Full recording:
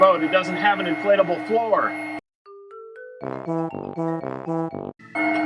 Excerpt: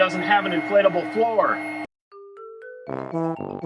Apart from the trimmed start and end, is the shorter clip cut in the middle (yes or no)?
no